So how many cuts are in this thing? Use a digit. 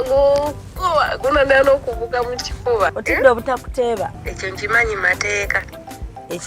2